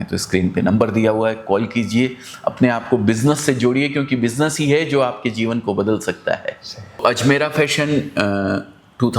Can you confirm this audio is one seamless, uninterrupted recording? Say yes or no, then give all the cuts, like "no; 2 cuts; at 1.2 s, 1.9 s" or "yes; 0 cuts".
no; 1 cut; at 7.0 s